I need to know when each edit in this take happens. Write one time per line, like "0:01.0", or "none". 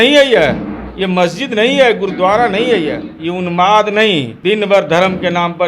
0:03.1
0:04.3